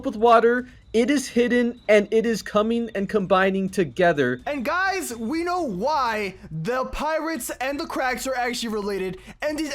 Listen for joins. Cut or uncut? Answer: uncut